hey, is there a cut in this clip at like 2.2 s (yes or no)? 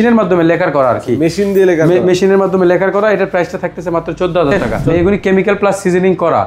no